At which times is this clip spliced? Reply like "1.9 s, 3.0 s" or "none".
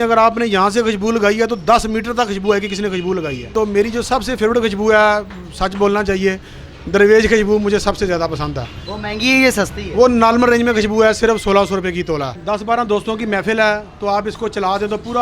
3.5 s, 12.3 s